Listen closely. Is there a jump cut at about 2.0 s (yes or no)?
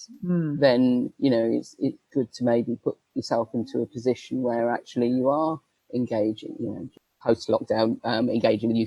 yes